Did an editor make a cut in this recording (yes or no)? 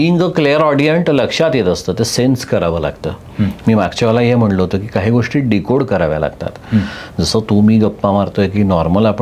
no